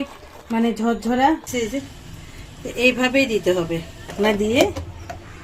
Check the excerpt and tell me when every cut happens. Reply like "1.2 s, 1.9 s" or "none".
1.5 s, 4.1 s